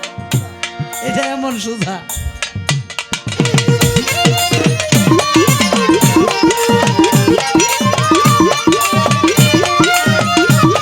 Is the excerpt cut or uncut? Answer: uncut